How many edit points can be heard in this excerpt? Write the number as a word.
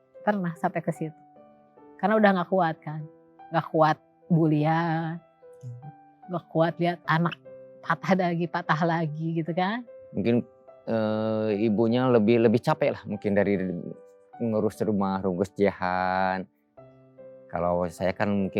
one